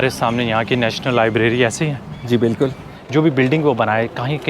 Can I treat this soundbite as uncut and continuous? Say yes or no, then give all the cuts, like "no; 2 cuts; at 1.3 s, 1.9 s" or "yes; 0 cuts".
no; 1 cut; at 2.9 s